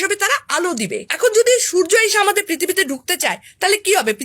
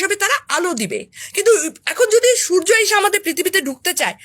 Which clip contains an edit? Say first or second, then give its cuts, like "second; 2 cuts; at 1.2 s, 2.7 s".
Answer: first; 1 cut; at 1.1 s